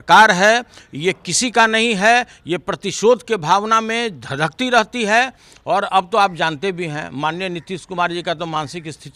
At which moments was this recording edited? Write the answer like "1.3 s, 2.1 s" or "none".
none